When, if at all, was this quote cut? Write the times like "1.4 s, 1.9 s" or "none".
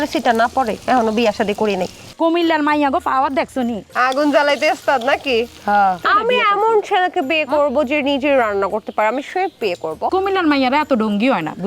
2.0 s, 6.1 s, 10.1 s